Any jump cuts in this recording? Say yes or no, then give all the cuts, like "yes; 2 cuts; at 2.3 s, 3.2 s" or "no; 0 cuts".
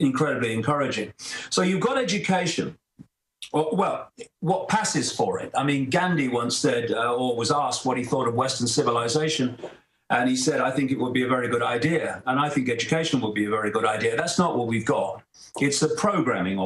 yes; 1 cut; at 5.7 s